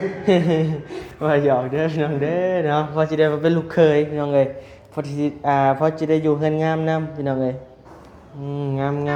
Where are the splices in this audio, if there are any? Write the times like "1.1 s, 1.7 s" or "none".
none